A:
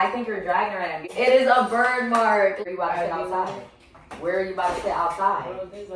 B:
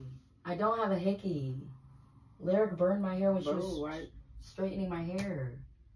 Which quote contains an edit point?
A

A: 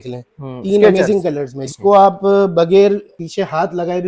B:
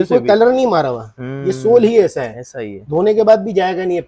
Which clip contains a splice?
A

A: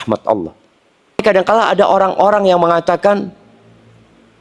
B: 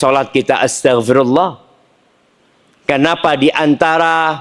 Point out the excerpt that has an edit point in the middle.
A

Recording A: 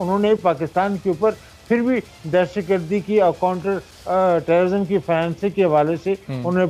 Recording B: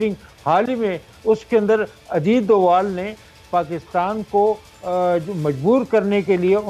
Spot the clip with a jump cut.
B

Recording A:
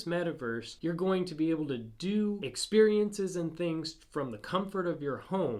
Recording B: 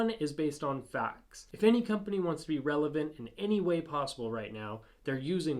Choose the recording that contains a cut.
B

